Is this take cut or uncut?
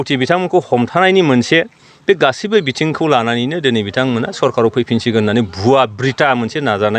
uncut